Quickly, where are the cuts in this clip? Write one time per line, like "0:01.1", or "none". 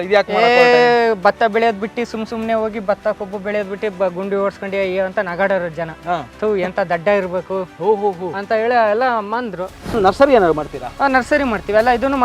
0:06.3
0:09.9